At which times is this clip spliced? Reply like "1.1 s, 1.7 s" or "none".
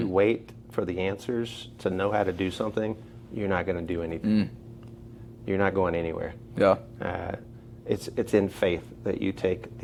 none